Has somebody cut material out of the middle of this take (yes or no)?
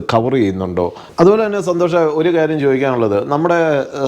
yes